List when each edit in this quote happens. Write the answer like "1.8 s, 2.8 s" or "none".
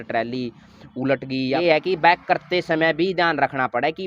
1.6 s